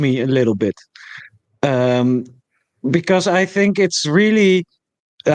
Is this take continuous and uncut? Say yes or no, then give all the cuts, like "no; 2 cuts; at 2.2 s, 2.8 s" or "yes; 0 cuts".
yes; 0 cuts